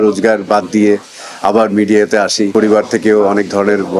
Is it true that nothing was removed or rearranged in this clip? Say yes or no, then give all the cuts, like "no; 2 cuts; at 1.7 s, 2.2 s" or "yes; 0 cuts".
no; 1 cut; at 2.5 s